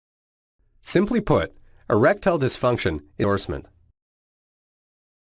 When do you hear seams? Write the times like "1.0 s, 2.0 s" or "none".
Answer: none